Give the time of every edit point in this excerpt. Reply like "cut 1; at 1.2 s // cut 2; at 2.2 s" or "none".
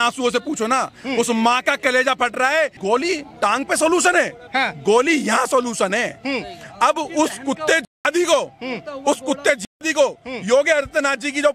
cut 1; at 2.8 s